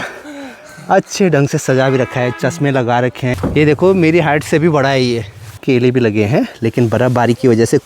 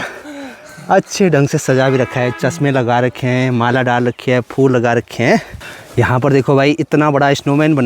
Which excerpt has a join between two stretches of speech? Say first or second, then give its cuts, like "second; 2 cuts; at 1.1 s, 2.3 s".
first; 2 cuts; at 3.3 s, 5.6 s